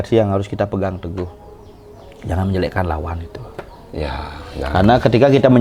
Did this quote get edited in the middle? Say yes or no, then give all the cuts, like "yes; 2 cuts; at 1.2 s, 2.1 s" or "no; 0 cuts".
no; 0 cuts